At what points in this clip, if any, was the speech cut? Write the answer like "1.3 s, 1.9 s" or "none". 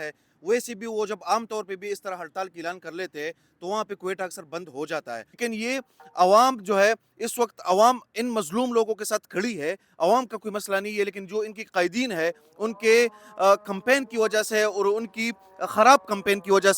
5.4 s